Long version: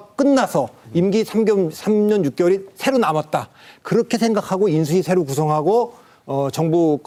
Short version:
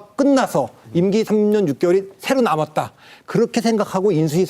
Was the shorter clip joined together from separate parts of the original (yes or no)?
yes